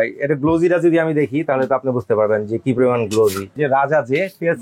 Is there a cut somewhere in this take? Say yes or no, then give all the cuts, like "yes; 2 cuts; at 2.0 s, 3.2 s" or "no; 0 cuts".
yes; 1 cut; at 3.6 s